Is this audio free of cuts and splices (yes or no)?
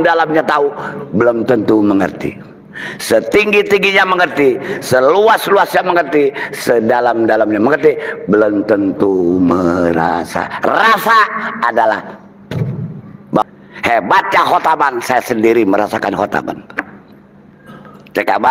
no